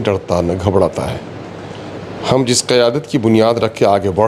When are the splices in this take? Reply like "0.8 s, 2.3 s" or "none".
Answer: none